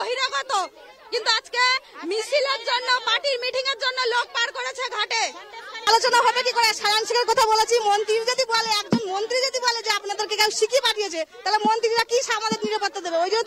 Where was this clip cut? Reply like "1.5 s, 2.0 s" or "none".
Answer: 5.7 s